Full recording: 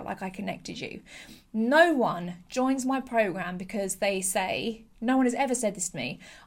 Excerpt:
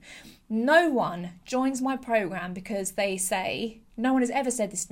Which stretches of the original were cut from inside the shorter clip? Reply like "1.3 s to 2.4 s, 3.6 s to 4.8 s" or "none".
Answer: none